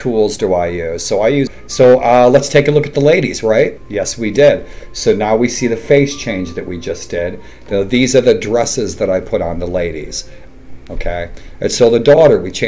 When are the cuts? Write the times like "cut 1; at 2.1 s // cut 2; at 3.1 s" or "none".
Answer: cut 1; at 1.5 s // cut 2; at 3.8 s // cut 3; at 10.4 s